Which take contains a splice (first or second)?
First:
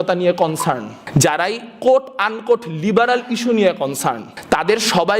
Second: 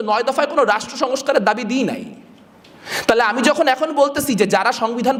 first